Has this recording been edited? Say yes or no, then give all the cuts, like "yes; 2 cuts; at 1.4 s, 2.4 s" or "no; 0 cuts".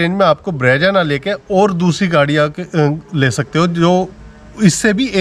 no; 0 cuts